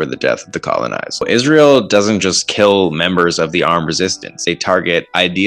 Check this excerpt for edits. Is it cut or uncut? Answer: cut